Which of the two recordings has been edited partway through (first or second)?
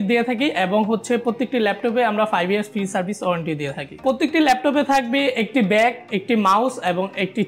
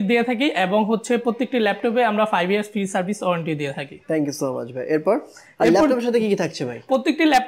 first